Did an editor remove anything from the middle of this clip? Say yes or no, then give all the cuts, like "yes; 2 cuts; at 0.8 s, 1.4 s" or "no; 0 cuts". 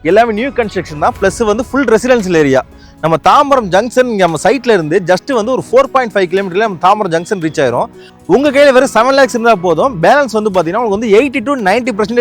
yes; 1 cut; at 8.1 s